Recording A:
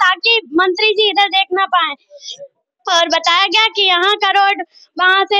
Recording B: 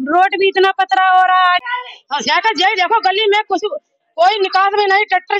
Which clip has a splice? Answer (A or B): B